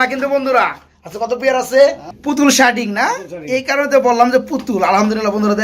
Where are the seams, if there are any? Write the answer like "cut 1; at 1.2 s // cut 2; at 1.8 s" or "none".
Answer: cut 1; at 2.1 s